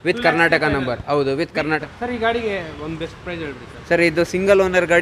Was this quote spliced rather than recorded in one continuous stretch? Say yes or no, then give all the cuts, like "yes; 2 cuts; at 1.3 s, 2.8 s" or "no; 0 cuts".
yes; 1 cut; at 1.8 s